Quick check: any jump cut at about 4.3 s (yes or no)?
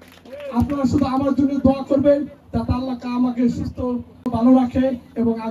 yes